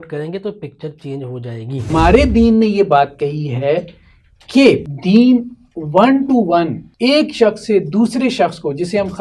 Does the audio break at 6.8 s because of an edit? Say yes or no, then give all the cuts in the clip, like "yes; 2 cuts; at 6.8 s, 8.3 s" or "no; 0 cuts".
yes; 3 cuts; at 1.9 s, 4.9 s, 6.8 s